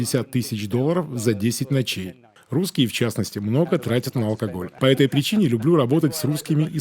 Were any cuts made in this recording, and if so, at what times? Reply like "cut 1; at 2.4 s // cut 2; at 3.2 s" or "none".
cut 1; at 2.3 s // cut 2; at 4.6 s